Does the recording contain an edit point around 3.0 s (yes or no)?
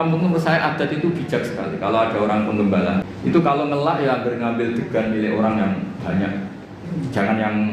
yes